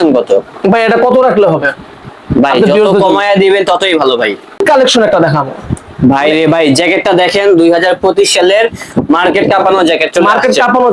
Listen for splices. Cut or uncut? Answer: cut